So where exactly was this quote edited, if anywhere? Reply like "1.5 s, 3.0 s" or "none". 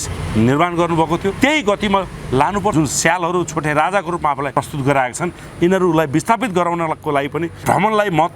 1.4 s, 2.7 s, 4.5 s, 7.5 s